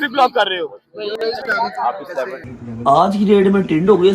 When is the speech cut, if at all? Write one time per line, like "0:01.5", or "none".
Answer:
0:02.4

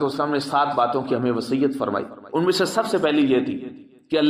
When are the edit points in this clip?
none

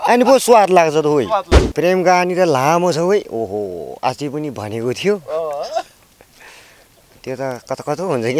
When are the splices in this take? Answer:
0:01.6

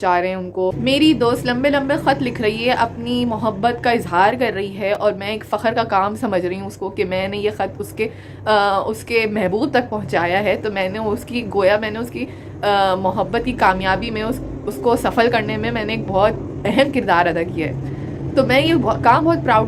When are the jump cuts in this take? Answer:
none

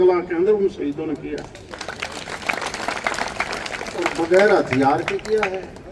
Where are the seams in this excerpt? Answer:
none

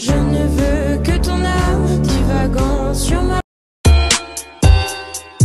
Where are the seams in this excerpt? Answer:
0:03.4

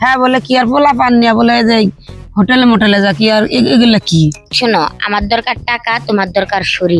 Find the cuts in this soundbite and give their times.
0:04.5

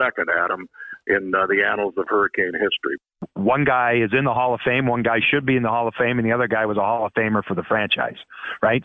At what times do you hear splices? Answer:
0:03.0

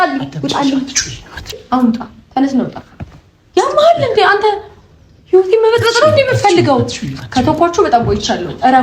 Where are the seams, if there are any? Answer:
0:01.6

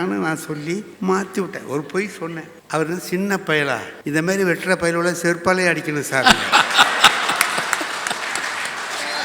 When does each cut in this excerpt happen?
0:00.9
0:02.5
0:03.9

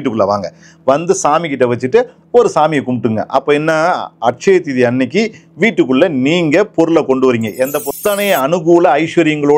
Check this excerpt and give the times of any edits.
0:07.9

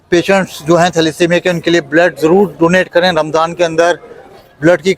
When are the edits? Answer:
none

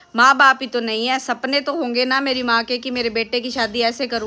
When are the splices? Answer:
none

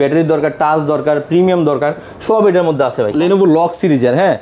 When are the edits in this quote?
0:03.1

